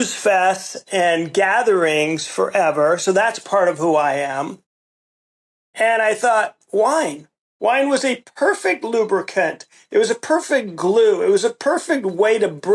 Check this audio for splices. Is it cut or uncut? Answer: uncut